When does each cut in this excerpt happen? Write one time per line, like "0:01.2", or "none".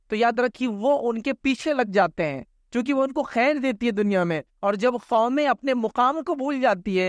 none